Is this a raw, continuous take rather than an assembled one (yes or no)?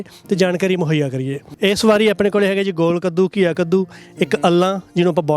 no